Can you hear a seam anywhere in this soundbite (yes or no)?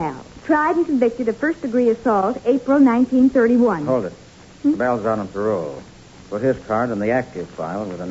yes